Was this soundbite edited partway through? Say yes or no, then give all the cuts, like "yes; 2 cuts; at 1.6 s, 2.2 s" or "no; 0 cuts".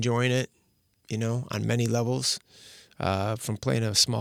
no; 0 cuts